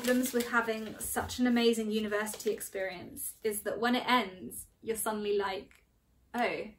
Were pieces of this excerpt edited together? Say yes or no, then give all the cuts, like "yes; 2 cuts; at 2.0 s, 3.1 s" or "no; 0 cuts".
no; 0 cuts